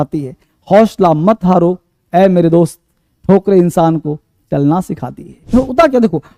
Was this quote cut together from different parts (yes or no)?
yes